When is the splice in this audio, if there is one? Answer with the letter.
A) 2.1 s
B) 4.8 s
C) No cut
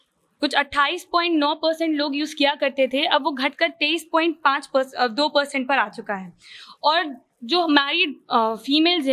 C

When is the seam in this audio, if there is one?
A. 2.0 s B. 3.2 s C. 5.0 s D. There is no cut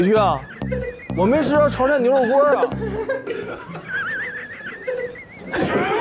B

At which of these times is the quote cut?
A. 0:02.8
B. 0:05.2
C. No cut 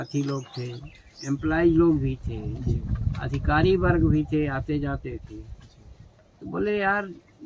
C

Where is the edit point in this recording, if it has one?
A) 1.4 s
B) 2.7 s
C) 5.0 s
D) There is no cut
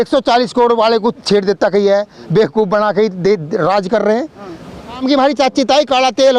C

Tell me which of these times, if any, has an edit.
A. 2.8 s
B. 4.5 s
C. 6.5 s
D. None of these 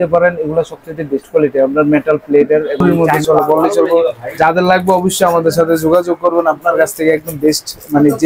A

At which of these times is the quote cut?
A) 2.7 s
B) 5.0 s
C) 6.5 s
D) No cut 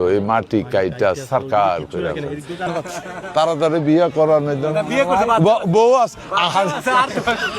A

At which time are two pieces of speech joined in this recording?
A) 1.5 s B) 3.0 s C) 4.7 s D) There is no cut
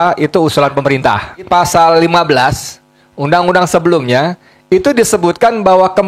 A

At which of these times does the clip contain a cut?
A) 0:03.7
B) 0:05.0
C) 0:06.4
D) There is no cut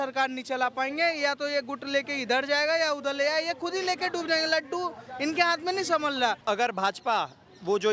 C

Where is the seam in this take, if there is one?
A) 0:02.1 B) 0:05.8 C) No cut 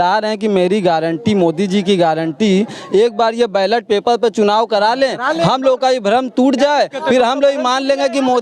C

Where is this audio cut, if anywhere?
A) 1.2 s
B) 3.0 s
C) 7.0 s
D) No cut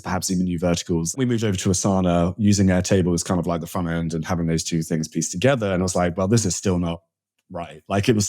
A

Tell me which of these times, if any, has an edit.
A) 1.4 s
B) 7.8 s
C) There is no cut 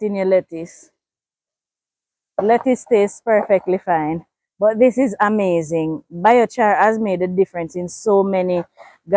C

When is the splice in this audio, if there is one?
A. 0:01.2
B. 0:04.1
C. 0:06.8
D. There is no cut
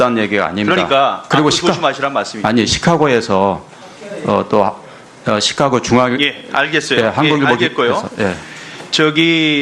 B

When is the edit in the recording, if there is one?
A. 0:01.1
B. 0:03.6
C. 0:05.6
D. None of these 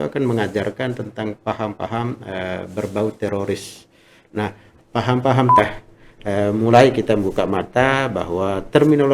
C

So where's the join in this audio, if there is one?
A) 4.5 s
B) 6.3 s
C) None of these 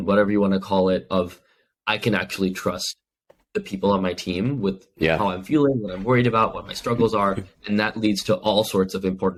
C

